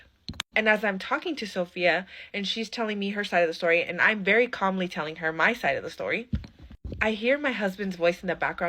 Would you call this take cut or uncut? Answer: uncut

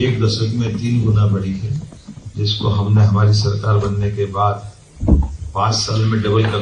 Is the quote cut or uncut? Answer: uncut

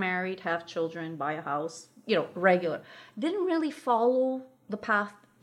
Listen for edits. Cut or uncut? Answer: uncut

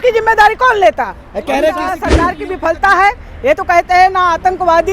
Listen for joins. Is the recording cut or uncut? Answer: cut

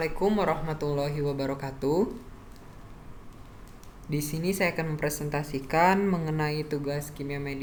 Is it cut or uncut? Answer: uncut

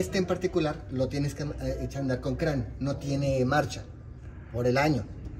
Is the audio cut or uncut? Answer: uncut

